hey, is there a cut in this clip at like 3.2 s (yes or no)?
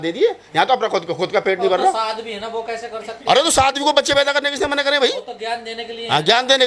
no